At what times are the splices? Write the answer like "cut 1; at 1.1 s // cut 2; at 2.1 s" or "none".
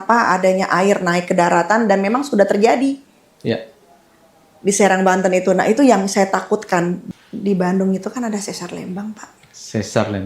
cut 1; at 7.0 s